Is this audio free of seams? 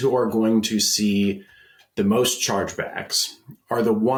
yes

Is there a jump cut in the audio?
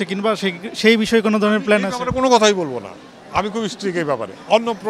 no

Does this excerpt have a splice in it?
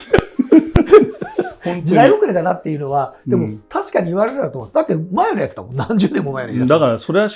no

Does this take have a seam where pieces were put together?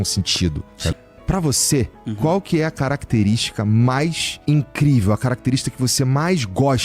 yes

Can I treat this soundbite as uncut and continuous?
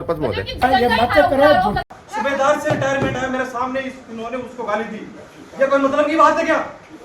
no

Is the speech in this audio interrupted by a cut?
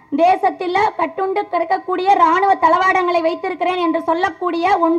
no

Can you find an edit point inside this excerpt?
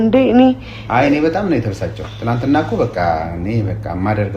no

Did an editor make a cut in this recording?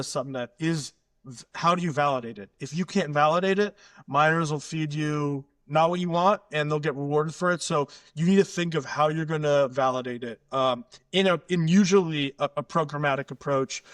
no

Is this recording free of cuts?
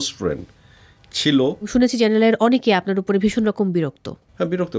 no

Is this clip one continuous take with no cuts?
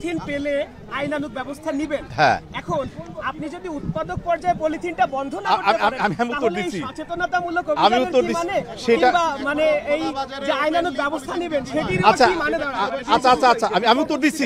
yes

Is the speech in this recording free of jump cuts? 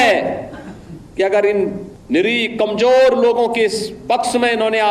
no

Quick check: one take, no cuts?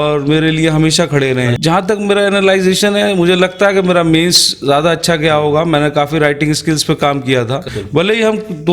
no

